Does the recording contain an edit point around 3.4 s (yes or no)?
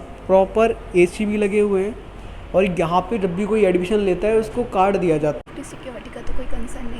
no